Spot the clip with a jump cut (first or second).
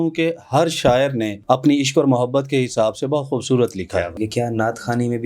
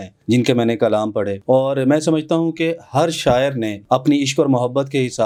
first